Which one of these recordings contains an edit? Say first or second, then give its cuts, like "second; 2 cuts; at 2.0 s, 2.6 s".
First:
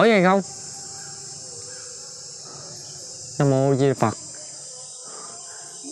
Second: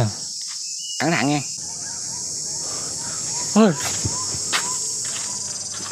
second; 1 cut; at 1.6 s